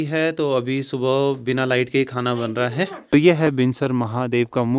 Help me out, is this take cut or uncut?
cut